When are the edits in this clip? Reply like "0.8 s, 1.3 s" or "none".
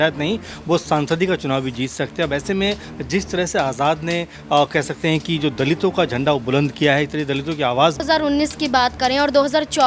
8.0 s